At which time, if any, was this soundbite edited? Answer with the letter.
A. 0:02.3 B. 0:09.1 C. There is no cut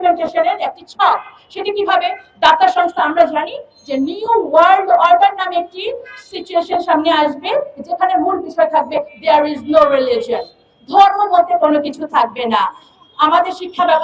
C